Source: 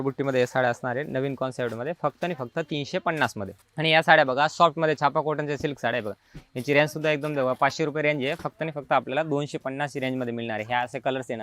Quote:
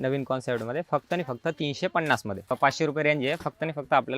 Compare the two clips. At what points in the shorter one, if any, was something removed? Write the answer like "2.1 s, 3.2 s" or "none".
2.5 s